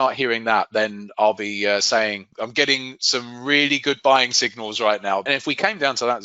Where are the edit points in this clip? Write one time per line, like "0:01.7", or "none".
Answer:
0:02.3
0:05.3